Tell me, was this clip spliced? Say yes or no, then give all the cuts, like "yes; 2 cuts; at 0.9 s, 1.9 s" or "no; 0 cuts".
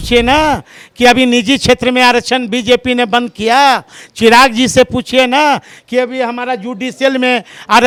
no; 0 cuts